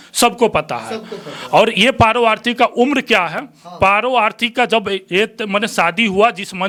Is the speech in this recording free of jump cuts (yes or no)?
yes